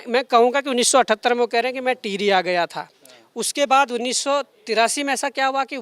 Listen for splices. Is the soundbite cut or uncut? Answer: uncut